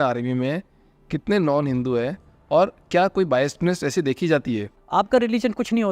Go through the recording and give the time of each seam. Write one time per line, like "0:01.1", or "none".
0:04.8